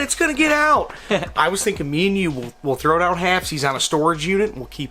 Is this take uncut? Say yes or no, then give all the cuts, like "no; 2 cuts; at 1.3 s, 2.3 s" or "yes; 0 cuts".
yes; 0 cuts